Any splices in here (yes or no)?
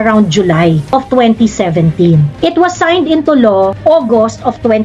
yes